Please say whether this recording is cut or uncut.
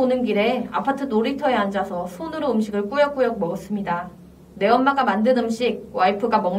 uncut